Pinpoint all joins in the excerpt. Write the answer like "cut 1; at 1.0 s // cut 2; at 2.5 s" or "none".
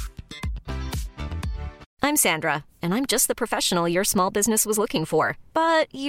cut 1; at 1.8 s